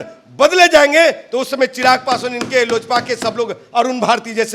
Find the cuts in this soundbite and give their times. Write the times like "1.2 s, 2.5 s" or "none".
none